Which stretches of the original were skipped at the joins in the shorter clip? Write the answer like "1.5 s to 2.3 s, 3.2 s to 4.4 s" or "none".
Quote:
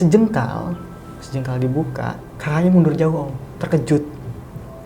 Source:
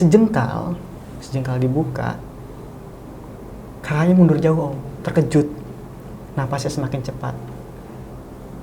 2.3 s to 3.7 s

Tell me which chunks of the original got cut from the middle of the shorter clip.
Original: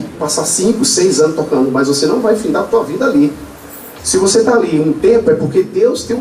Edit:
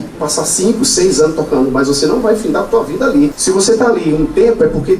3.4 s to 4.0 s

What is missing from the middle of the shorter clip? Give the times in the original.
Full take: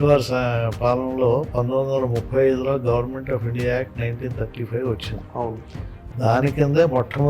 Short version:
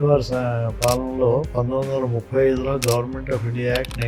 none

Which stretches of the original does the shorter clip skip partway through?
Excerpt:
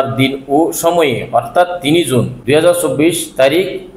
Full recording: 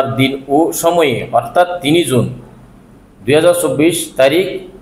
2.3 s to 3.2 s

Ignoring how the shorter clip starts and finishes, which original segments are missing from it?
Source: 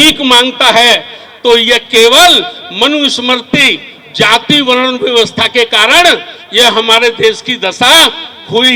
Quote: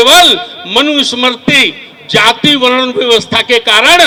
none

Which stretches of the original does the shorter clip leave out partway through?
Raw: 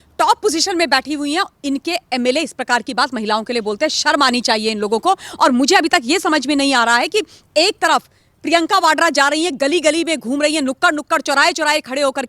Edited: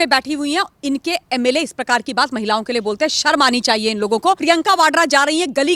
5.2 s to 8.4 s

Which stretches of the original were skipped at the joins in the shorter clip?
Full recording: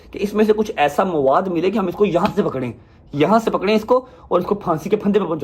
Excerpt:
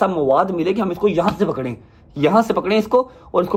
none

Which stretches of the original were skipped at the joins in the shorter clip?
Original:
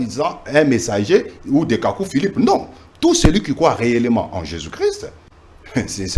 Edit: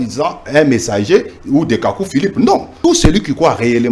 2.7 s to 2.9 s

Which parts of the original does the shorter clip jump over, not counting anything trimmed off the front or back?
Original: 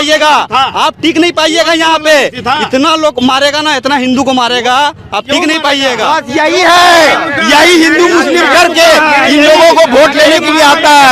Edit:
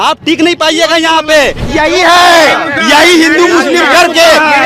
2.4 s to 6.2 s

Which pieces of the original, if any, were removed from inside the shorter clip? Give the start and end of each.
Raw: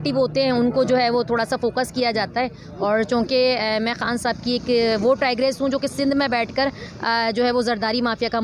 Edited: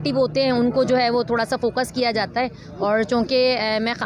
none

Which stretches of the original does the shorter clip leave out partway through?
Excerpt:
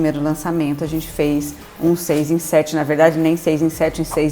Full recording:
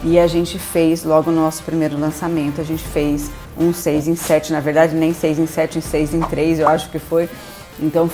none

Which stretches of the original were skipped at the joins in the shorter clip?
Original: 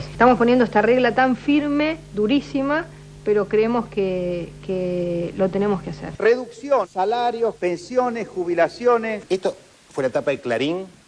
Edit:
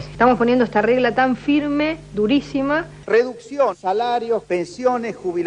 2.9 s to 6.1 s

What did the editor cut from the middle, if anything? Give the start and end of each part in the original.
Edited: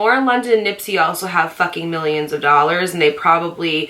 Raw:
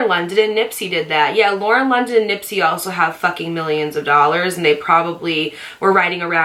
none

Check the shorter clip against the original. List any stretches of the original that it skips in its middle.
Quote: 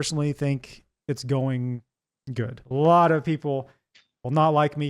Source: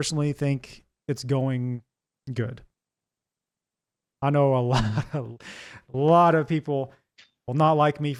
2.6 s to 5.8 s

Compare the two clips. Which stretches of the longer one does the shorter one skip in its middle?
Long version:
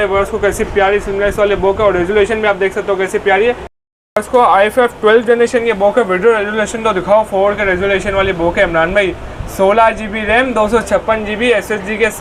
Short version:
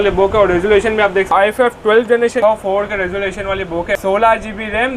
2.8 s to 4.5 s, 5.6 s to 7.1 s, 8.7 s to 9.5 s

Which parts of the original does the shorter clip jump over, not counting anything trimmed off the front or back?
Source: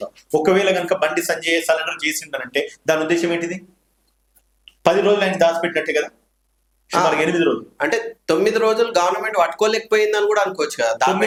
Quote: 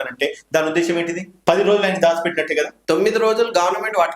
3.6 s to 4.7 s, 6.1 s to 8.2 s

